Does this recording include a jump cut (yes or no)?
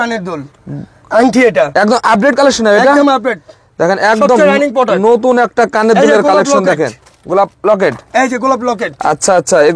no